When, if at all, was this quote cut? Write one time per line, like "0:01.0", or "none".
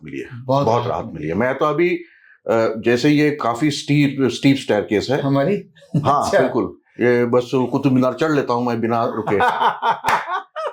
none